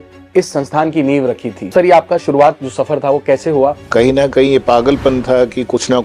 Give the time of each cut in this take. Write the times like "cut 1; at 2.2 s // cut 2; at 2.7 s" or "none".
cut 1; at 1.7 s // cut 2; at 3.8 s